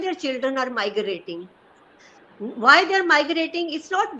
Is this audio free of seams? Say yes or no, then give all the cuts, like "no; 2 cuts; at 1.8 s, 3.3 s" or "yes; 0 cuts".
yes; 0 cuts